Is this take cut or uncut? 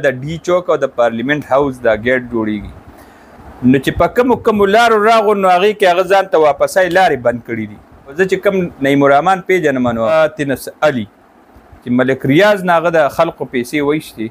cut